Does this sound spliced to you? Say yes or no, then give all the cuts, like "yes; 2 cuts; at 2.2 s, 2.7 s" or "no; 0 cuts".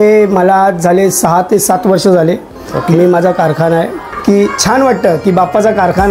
yes; 1 cut; at 4.0 s